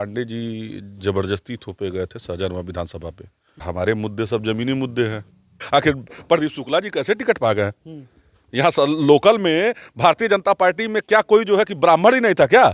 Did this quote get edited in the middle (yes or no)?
yes